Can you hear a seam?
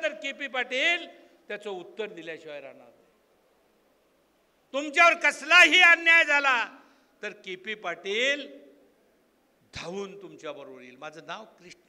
no; 0 cuts

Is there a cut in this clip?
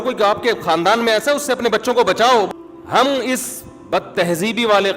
yes; 1 cut; at 2.5 s

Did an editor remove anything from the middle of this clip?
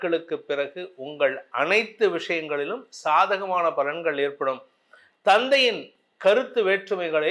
no; 0 cuts

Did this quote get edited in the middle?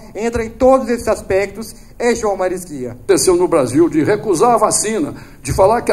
yes; 1 cut; at 3.0 s

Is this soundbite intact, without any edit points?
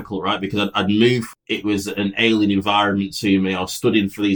no; 1 cut; at 1.3 s

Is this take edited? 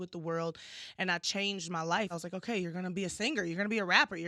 yes; 1 cut; at 2.1 s

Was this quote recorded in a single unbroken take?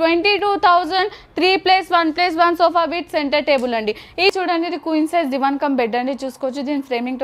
no; 1 cut; at 4.3 s

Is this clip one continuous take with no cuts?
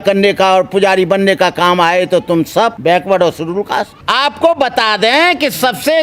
no; 2 cuts; at 2.8 s, 4.0 s

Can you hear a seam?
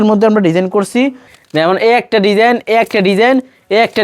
yes; 1 cut; at 1.3 s

